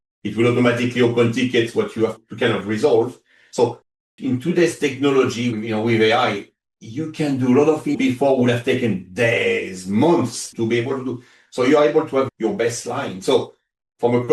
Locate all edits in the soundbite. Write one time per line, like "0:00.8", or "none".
0:02.2
0:05.5
0:08.0
0:10.5
0:12.3